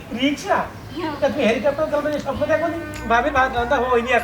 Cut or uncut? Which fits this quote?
cut